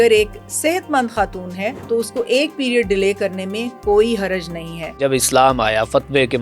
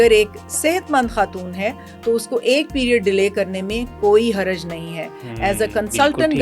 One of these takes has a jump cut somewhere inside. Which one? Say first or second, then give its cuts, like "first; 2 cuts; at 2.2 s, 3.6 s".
first; 2 cuts; at 1.8 s, 5.0 s